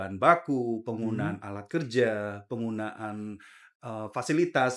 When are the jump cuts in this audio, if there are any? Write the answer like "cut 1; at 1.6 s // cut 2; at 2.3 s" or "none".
none